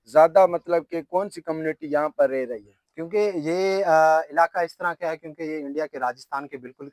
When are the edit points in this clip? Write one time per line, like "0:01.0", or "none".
none

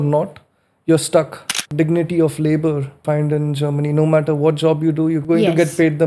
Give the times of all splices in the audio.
0:01.6
0:03.0
0:05.2

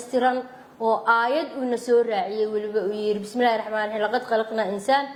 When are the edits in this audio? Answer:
none

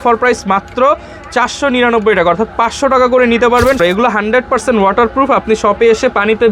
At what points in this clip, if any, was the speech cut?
0:03.8

